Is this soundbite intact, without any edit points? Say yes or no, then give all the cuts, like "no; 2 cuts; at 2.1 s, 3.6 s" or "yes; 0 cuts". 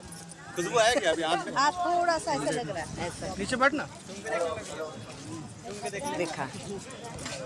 yes; 0 cuts